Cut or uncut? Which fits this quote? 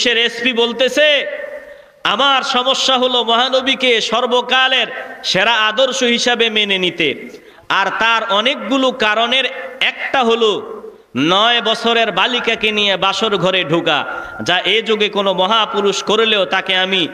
uncut